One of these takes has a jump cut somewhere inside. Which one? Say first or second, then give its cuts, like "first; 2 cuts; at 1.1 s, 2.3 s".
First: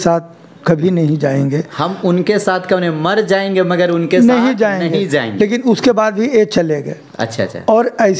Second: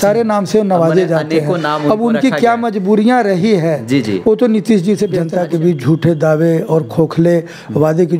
second; 1 cut; at 5.2 s